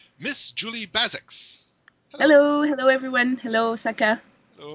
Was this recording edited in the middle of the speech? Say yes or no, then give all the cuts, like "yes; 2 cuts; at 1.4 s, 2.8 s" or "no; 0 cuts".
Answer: yes; 1 cut; at 3.8 s